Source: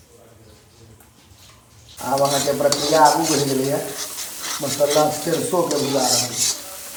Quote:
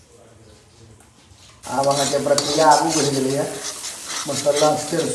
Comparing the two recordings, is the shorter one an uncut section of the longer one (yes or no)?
no